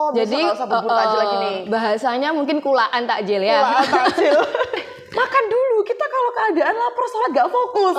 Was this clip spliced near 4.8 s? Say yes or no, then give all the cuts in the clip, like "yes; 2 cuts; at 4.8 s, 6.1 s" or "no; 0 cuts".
yes; 1 cut; at 4.8 s